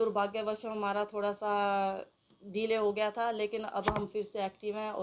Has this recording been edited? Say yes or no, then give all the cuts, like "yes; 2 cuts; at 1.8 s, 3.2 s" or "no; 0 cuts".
no; 0 cuts